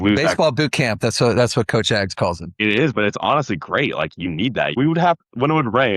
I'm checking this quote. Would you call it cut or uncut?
cut